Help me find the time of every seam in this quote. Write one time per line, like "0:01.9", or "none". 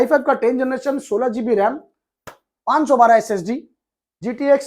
none